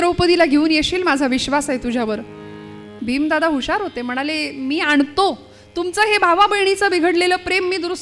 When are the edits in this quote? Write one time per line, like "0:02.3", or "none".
none

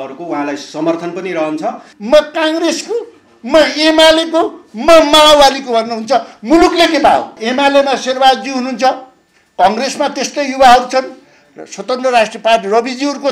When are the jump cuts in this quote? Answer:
0:01.9
0:07.4

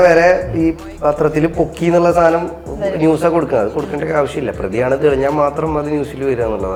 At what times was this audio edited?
none

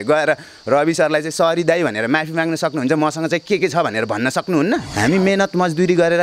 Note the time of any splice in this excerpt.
0:04.9

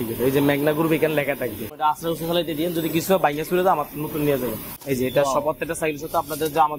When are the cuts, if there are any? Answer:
0:01.7
0:04.7

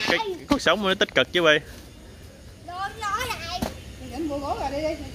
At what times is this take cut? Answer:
none

